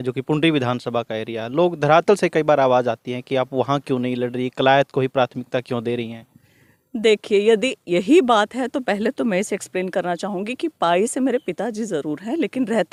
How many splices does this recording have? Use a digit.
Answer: 0